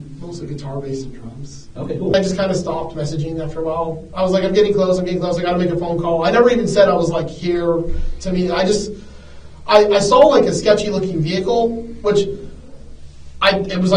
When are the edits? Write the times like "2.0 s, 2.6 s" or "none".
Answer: 2.1 s